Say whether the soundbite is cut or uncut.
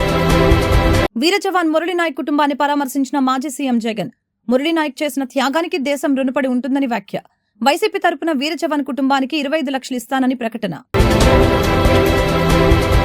uncut